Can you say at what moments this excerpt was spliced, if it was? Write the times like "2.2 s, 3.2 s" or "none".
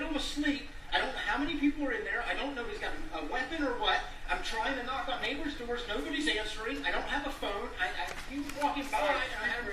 none